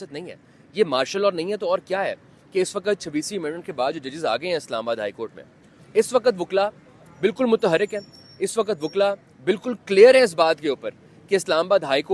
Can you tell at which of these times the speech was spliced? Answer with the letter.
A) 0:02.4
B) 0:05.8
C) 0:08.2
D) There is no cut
B